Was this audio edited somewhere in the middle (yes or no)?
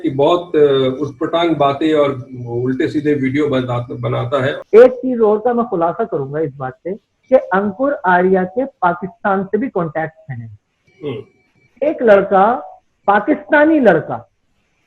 yes